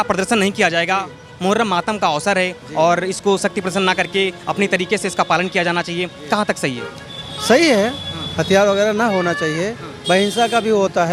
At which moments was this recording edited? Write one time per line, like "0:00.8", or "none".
none